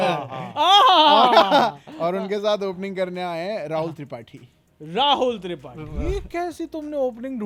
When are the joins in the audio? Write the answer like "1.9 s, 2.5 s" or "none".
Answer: none